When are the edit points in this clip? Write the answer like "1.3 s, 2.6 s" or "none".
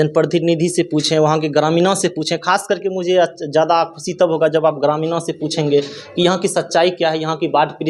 none